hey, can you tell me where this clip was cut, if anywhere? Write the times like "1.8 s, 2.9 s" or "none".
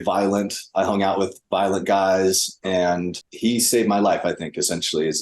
3.1 s